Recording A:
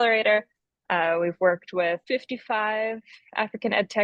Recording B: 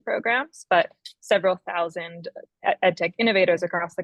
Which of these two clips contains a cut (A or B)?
A